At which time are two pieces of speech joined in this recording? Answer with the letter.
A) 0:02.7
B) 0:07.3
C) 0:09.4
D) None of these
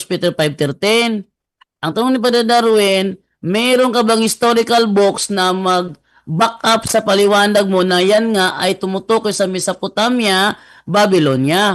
D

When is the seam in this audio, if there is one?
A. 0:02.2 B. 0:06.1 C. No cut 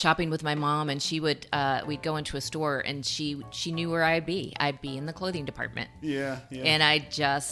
C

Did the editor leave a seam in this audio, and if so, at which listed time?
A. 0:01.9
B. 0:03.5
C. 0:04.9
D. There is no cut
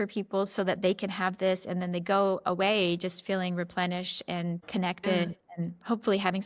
D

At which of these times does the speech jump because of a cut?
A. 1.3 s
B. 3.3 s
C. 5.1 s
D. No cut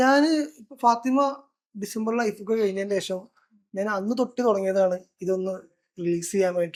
D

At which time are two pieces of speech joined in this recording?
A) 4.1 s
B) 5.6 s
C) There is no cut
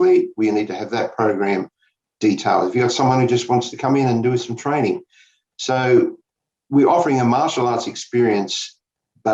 C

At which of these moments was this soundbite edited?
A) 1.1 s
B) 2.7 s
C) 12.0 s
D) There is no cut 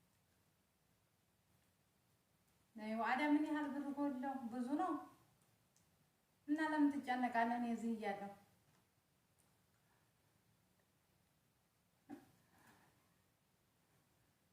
D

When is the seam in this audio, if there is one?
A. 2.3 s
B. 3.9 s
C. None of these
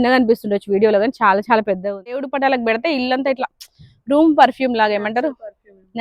A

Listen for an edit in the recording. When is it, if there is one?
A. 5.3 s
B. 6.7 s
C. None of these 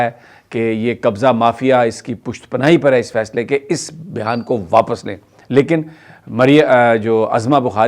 C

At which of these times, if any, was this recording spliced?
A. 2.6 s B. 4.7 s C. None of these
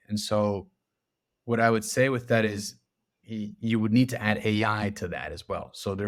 C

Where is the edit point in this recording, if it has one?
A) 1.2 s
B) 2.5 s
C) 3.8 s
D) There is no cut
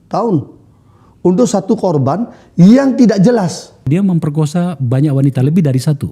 C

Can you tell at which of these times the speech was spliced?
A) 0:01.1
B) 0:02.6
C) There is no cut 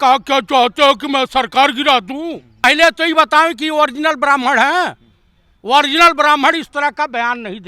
B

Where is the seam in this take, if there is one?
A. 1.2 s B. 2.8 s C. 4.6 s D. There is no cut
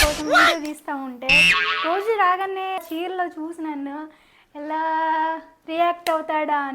B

